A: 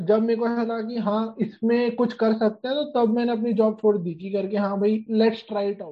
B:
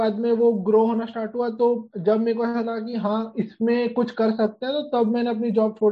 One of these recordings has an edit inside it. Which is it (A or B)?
A